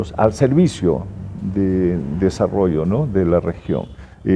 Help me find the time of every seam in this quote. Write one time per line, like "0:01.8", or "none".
none